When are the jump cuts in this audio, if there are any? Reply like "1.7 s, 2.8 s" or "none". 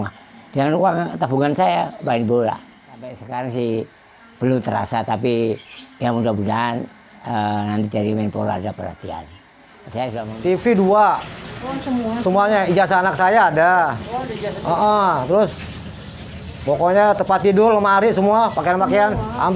3.2 s, 10.3 s